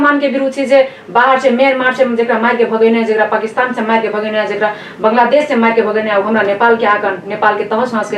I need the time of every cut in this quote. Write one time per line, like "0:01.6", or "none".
none